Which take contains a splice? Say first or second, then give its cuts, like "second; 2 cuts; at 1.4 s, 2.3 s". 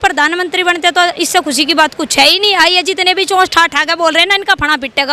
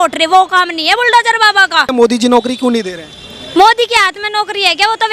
second; 1 cut; at 1.9 s